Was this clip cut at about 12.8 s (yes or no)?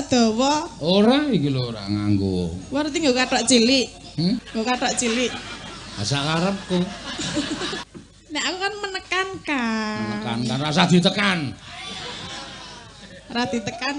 no